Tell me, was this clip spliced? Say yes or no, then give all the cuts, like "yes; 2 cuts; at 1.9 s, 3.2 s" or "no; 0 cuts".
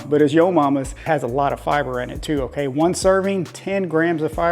yes; 1 cut; at 1.0 s